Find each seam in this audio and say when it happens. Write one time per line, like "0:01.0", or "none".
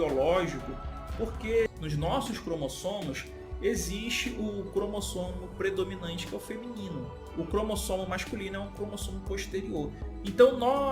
0:01.7